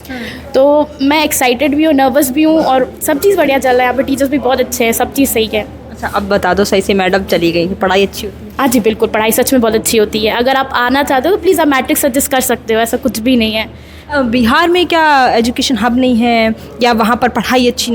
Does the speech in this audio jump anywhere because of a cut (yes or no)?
no